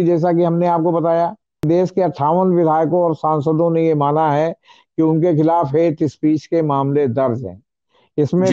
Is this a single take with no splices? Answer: no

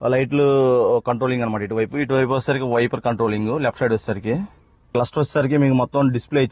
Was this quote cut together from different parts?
no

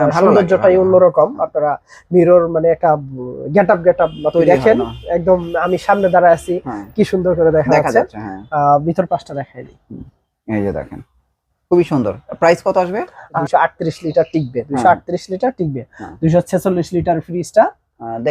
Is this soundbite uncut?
no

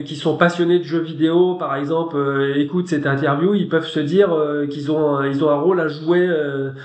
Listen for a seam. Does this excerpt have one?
no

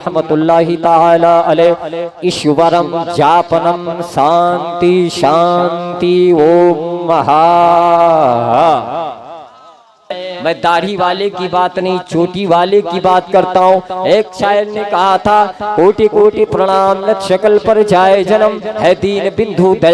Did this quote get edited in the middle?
yes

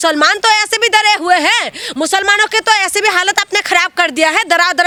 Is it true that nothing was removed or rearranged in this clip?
yes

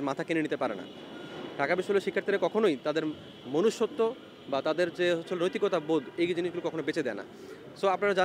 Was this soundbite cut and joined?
no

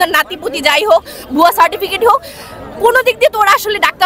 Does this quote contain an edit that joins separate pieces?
no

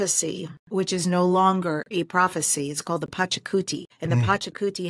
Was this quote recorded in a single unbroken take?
no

